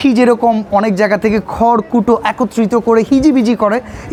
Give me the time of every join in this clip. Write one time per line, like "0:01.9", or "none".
none